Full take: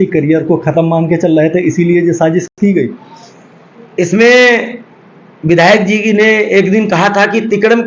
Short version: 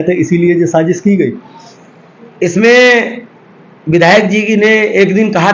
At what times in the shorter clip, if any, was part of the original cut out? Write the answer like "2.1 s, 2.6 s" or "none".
1.0 s